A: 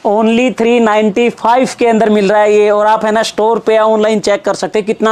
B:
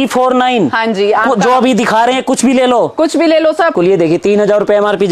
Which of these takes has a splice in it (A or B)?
B